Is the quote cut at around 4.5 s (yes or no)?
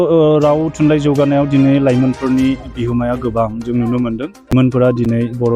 yes